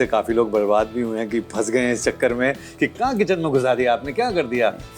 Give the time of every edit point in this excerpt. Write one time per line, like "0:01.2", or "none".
none